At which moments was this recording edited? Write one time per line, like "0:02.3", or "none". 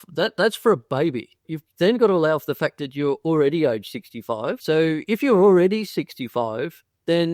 0:01.6
0:04.6